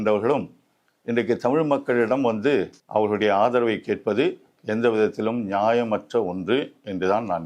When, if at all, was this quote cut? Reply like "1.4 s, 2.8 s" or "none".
2.8 s